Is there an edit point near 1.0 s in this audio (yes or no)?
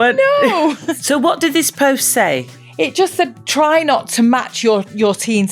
yes